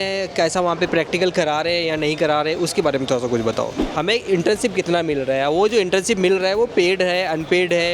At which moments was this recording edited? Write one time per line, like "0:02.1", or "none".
0:03.8